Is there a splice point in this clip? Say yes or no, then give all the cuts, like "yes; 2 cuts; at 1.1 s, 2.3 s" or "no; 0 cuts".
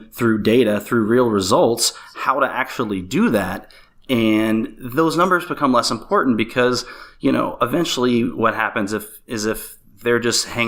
no; 0 cuts